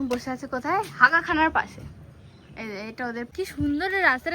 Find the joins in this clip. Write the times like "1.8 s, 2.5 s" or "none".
3.3 s

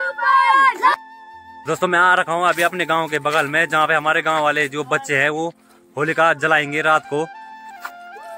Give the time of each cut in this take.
0.9 s

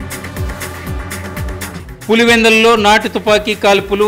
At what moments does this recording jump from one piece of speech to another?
1.7 s

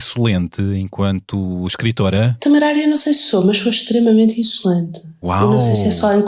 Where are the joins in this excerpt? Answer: 2.3 s

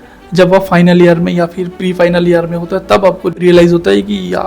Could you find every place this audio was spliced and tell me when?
3.3 s

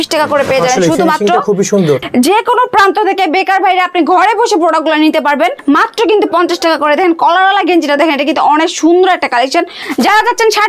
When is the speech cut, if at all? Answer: 2.0 s, 5.6 s, 9.8 s

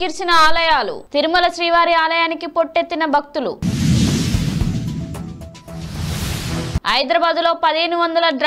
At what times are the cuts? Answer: none

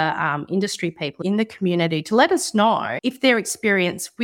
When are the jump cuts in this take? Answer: 2.9 s

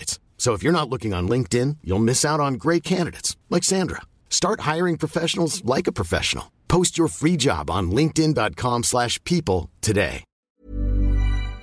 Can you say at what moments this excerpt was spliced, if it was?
10.3 s

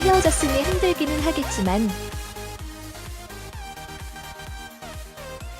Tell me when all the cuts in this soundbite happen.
1.9 s

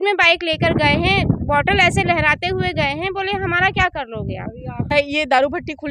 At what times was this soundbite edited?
4.9 s

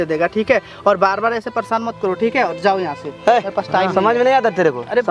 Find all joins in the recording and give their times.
none

